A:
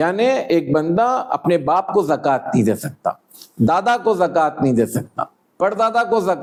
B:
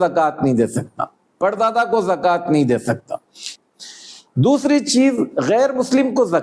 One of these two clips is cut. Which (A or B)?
B